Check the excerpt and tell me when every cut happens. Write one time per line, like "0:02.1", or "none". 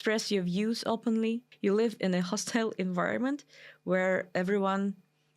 0:01.5